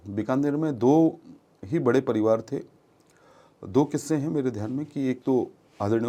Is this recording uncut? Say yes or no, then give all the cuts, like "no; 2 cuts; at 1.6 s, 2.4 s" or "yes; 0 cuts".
yes; 0 cuts